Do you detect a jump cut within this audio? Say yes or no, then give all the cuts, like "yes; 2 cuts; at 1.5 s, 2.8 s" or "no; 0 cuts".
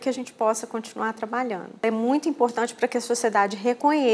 yes; 1 cut; at 1.8 s